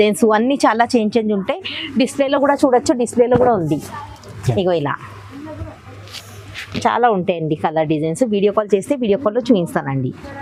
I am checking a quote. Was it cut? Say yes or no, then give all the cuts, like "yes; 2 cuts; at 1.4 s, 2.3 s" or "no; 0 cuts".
no; 0 cuts